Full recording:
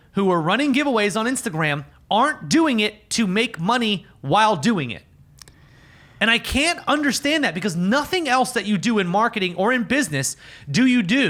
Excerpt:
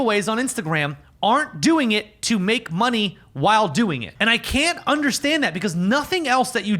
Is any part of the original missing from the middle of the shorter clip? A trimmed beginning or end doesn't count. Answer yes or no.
yes